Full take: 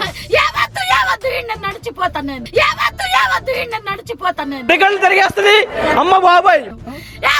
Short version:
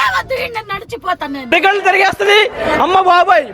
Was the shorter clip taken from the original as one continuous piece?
no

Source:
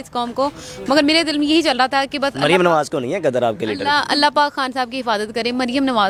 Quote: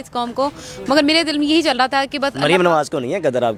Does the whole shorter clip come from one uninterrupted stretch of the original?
yes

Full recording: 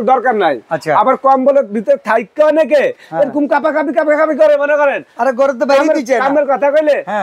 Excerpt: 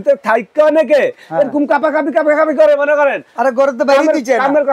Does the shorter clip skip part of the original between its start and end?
no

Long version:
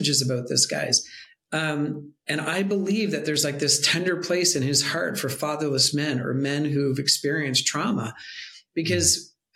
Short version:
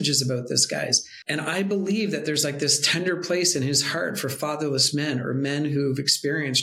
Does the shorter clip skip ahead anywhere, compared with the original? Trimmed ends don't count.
yes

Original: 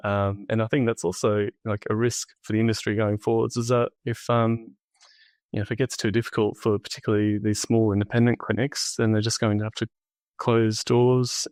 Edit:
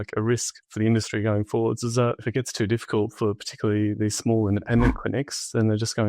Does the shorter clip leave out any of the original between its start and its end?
yes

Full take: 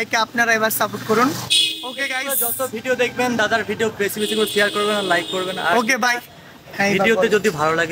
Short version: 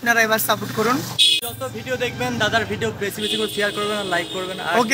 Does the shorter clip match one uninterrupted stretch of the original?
no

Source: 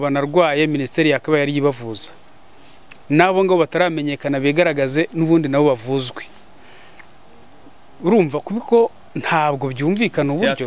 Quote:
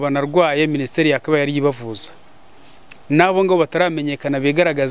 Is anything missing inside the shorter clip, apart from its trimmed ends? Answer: no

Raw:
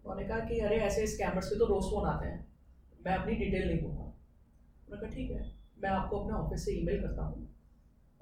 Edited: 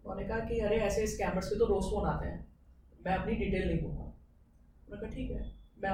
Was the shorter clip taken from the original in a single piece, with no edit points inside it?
yes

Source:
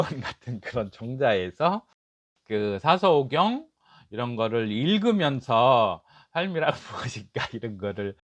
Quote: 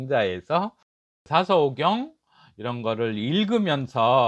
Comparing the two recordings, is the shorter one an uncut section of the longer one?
no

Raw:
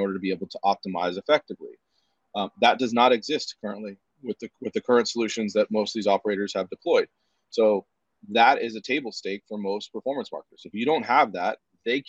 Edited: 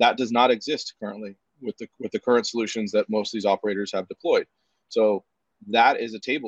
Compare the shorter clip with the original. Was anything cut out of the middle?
no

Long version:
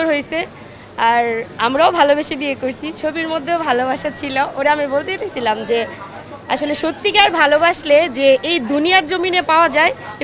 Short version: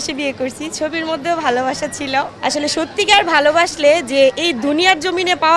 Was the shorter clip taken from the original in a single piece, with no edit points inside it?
no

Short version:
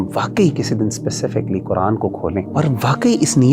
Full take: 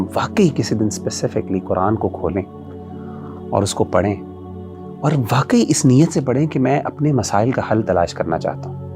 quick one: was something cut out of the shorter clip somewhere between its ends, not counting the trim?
yes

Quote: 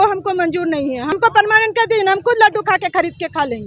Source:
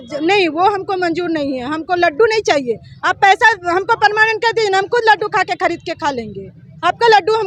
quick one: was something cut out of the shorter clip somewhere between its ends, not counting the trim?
yes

